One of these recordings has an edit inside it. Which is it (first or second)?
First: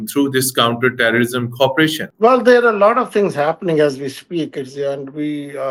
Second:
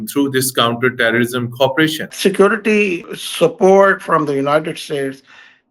second